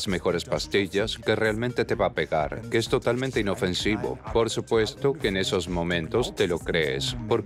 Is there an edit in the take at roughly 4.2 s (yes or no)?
yes